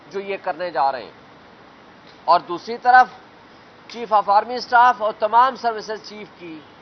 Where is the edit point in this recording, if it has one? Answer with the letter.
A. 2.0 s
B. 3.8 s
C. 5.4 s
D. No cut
C